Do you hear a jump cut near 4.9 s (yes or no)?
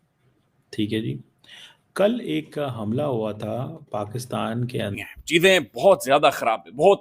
yes